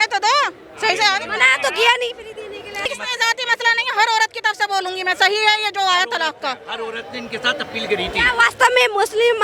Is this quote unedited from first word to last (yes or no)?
no